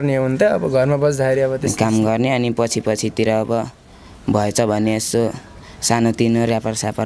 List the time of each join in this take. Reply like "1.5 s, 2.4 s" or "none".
1.6 s